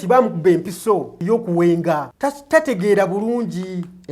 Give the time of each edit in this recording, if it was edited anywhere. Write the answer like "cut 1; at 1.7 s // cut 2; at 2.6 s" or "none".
cut 1; at 1.1 s // cut 2; at 2.1 s